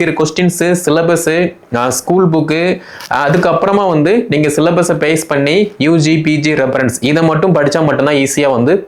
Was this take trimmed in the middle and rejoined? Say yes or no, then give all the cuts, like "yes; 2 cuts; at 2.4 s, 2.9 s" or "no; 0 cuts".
no; 0 cuts